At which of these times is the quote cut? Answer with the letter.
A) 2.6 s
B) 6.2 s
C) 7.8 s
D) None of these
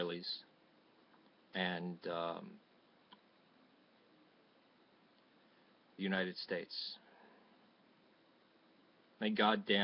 B